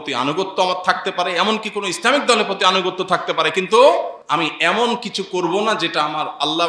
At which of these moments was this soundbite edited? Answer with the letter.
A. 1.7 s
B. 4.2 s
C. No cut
B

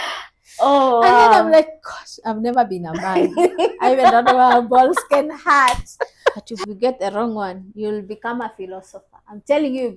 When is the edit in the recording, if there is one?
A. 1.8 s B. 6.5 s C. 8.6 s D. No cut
B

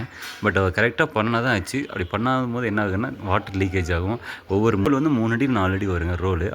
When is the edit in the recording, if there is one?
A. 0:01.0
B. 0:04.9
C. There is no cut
B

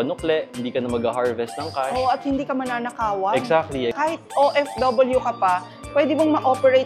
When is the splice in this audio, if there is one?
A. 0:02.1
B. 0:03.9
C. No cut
B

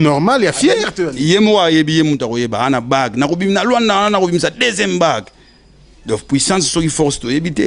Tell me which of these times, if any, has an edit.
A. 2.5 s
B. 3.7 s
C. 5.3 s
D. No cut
D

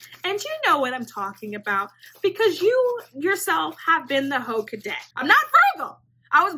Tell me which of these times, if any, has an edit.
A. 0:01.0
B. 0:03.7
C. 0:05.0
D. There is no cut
C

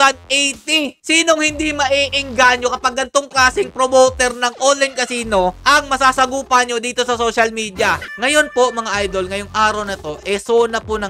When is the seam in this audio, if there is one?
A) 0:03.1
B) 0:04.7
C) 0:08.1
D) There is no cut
C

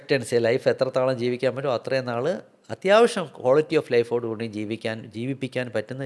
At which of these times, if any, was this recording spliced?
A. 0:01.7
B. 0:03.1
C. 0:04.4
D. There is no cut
D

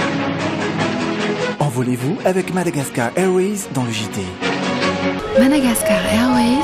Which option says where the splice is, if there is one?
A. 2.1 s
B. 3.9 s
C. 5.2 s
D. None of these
D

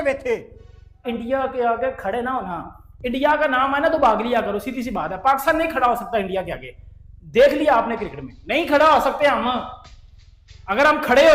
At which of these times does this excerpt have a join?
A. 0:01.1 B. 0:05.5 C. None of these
A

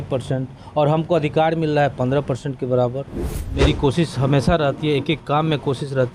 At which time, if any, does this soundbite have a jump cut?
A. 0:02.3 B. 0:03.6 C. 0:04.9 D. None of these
B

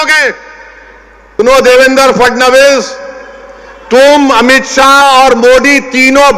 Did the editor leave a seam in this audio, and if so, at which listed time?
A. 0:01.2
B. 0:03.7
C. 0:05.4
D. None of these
A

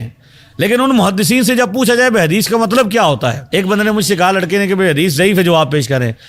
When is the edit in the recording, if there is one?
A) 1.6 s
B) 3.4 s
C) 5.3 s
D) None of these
B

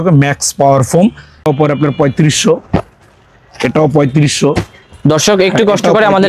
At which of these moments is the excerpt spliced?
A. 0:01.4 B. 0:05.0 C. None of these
A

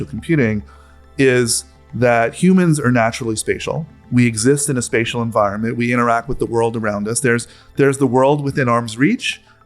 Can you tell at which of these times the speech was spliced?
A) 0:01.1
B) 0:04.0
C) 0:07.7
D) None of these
A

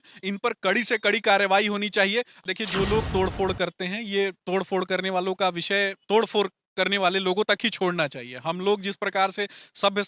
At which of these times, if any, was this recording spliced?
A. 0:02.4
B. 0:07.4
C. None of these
A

